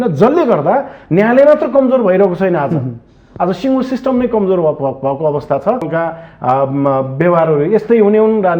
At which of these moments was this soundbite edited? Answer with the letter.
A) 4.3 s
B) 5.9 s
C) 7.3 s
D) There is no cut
B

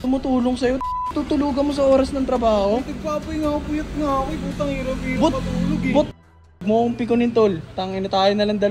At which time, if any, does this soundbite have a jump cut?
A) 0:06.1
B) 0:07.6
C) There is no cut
A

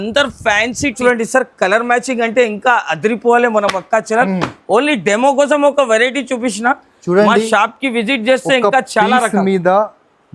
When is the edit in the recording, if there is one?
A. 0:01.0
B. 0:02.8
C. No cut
A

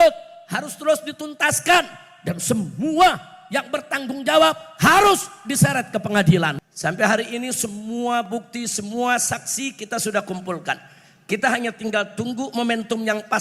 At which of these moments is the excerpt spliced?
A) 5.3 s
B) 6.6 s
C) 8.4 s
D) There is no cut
B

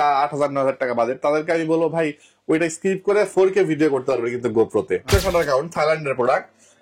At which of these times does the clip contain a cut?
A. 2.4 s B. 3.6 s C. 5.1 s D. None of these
C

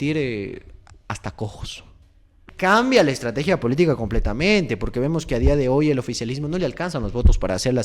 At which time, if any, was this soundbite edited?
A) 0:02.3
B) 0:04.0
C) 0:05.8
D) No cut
A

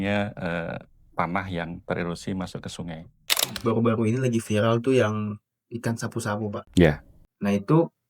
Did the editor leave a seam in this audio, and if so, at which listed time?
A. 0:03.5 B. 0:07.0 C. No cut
A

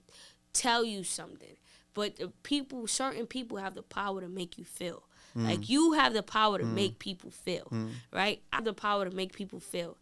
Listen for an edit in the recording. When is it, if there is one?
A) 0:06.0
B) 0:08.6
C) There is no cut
B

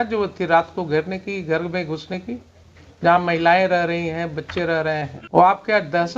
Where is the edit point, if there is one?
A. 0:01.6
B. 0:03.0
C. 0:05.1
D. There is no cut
C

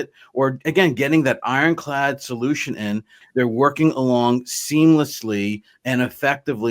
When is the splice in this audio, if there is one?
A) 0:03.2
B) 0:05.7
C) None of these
A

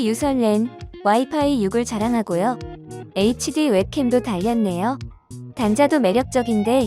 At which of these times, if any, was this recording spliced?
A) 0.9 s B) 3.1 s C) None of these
B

